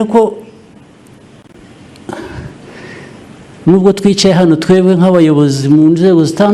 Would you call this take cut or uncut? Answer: uncut